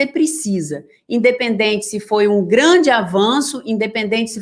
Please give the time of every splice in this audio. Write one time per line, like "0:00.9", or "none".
none